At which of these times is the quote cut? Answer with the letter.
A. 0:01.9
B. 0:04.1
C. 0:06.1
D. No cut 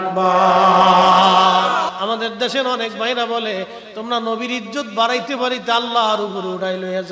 A